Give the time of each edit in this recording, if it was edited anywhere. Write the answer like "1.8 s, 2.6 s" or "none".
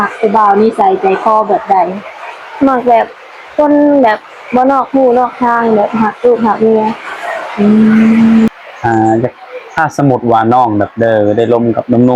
8.5 s